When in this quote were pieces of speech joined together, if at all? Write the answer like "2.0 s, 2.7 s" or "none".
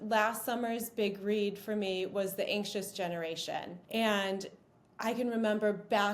3.8 s